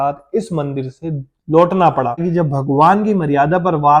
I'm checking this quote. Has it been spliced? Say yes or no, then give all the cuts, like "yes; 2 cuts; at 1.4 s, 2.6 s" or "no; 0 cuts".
yes; 1 cut; at 2.2 s